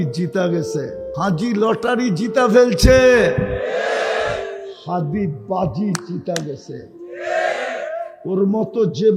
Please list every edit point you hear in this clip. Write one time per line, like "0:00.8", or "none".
0:01.0